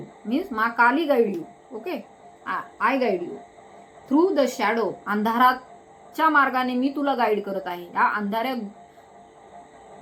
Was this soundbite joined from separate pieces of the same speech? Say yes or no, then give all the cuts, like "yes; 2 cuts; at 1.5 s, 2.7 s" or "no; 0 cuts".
no; 0 cuts